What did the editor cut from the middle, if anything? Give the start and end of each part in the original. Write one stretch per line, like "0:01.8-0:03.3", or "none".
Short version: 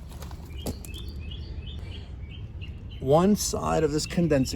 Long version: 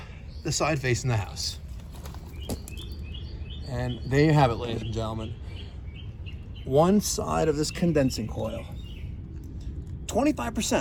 0:03.6-0:05.4